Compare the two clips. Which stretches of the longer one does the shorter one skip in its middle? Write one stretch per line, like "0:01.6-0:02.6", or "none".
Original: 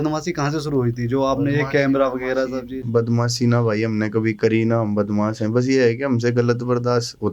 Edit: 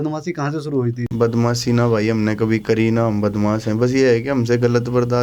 0:01.0-0:02.8